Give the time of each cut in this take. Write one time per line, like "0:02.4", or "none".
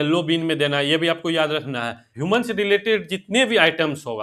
0:02.1